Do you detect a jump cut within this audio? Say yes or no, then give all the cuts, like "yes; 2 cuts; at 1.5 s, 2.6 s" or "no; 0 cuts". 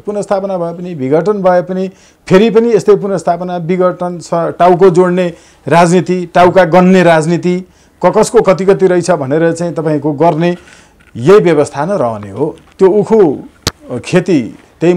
yes; 1 cut; at 12.6 s